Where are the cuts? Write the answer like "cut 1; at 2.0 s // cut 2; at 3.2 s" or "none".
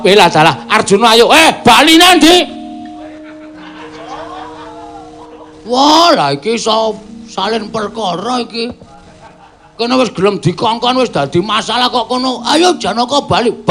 cut 1; at 2.2 s